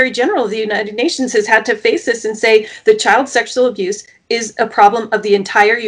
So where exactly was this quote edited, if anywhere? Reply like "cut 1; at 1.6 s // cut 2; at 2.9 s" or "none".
none